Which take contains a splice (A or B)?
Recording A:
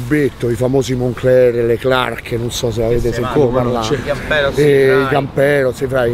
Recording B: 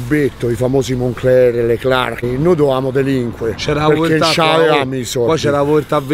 B